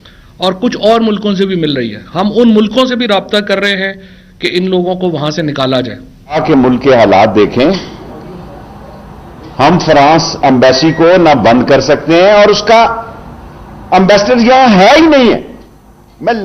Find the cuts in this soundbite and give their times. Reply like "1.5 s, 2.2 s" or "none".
6.2 s

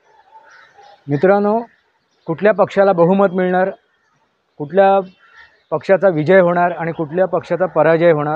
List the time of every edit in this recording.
none

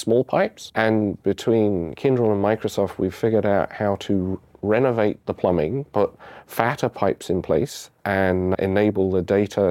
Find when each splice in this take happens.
5.2 s, 8.2 s

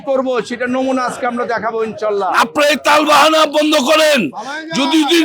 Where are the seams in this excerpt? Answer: 2.3 s

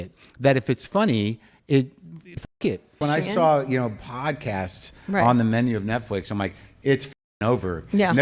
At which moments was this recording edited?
2.4 s

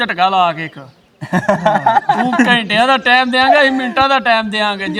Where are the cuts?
none

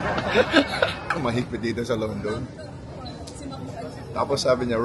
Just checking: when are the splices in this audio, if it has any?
1.1 s

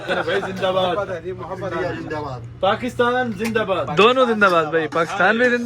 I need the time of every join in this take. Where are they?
1.7 s

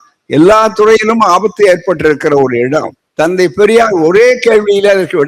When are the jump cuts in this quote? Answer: 3.0 s

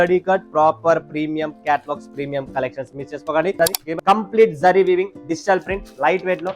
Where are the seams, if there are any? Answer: 3.6 s

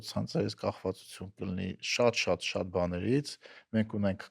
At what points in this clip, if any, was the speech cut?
none

